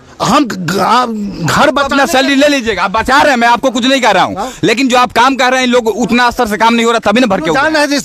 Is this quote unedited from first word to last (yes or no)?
yes